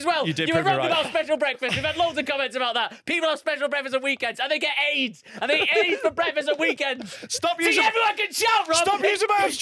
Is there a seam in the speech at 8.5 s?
no; 0 cuts

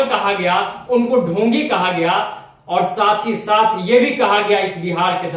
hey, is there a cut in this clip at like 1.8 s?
no; 0 cuts

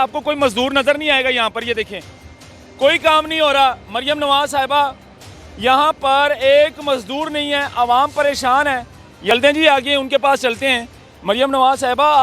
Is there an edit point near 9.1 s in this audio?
yes; 1 cut; at 9.1 s

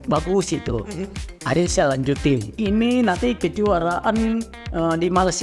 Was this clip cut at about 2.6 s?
yes; 1 cut; at 2.6 s

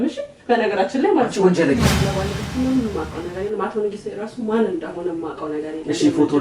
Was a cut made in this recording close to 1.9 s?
yes; 1 cut; at 1.9 s

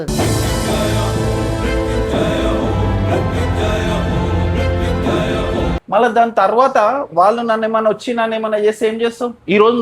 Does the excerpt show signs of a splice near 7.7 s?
no; 1 cut; at 5.8 s

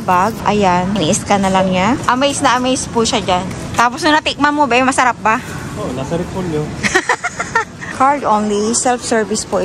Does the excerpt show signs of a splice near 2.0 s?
yes; 2 cuts; at 2.0 s, 7.9 s

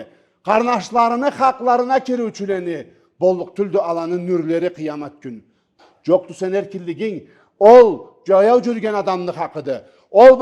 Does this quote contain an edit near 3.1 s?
no; 1 cut; at 5.8 s

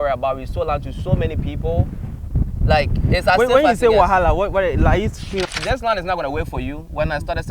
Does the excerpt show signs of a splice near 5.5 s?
yes; 1 cut; at 5.5 s

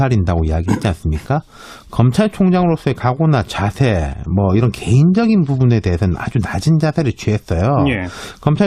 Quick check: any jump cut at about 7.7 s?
no; 1 cut; at 3.3 s

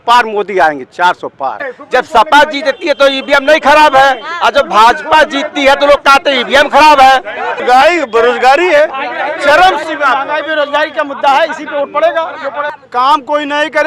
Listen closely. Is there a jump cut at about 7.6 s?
yes; 3 cuts; at 1.7 s, 7.6 s, 12.8 s

